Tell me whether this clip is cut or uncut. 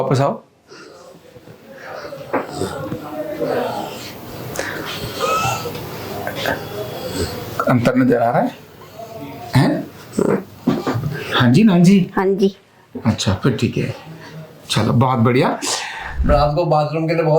cut